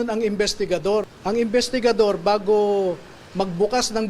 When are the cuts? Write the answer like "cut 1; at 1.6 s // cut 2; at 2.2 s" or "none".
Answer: cut 1; at 1.1 s